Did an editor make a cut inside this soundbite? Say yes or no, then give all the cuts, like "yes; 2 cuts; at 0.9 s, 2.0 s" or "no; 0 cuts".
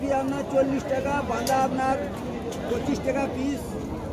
no; 0 cuts